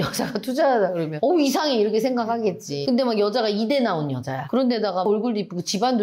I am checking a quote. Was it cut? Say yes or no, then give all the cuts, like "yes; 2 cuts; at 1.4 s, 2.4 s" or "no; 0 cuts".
yes; 2 cuts; at 2.8 s, 4.4 s